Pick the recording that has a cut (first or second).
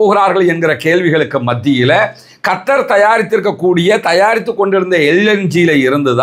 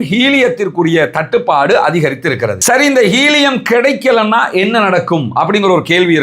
second